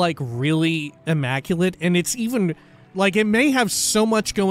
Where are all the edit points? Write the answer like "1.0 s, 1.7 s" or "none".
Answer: 0.9 s, 2.9 s